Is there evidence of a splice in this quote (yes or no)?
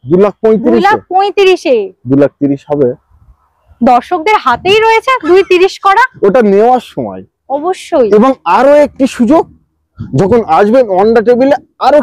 no